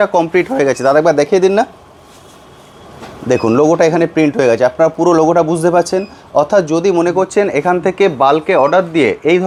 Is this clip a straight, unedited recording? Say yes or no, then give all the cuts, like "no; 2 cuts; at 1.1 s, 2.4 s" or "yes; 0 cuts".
yes; 0 cuts